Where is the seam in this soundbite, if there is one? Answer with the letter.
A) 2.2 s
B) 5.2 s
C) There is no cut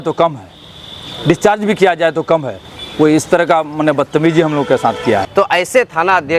B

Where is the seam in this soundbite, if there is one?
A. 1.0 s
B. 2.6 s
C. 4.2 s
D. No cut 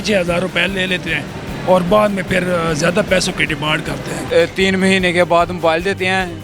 C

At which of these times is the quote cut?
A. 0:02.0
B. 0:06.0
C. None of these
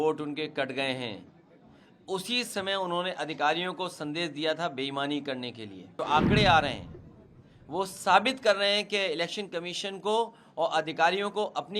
B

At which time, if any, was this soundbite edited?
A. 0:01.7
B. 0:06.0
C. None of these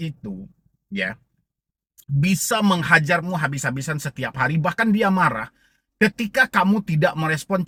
C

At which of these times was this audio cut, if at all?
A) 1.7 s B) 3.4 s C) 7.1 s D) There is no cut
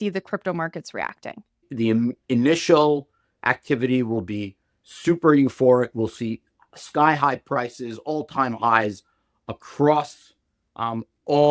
A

